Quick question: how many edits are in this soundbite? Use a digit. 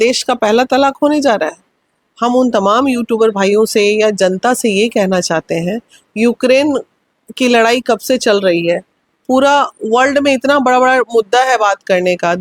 0